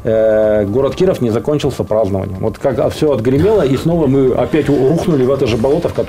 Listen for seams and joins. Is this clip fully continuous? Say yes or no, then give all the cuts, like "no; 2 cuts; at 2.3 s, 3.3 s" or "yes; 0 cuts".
yes; 0 cuts